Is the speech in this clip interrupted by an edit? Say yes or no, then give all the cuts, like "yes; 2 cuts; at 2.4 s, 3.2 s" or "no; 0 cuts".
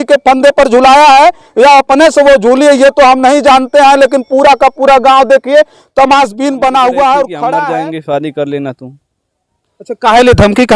yes; 1 cut; at 7.6 s